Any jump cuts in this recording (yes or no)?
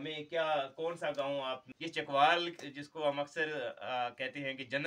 yes